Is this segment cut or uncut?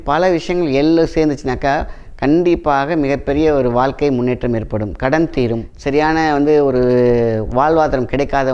cut